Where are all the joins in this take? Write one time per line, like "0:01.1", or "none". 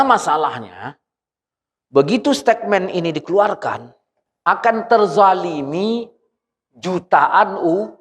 0:04.2